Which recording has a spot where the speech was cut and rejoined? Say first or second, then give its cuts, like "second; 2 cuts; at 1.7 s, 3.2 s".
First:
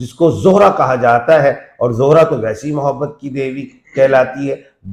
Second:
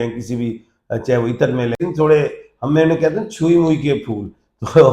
second; 1 cut; at 1.8 s